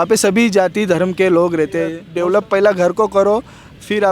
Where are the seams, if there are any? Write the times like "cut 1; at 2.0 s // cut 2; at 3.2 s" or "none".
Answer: cut 1; at 2.0 s